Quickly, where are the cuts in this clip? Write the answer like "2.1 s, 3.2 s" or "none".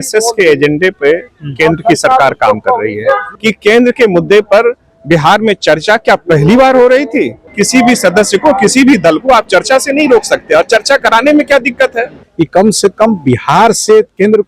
3.3 s, 7.4 s, 12.2 s